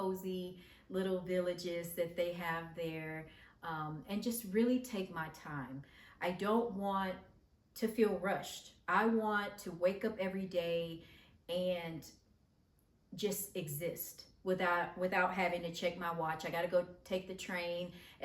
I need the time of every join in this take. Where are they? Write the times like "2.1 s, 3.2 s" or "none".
none